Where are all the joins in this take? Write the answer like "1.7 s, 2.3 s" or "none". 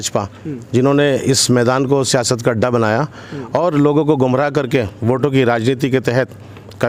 none